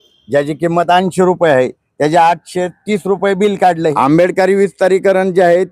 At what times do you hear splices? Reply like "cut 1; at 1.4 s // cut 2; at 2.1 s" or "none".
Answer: cut 1; at 3.9 s